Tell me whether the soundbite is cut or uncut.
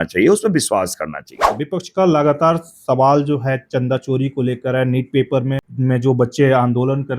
cut